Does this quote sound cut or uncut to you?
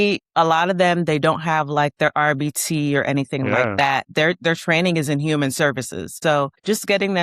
cut